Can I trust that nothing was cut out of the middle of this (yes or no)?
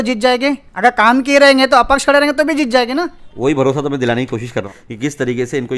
no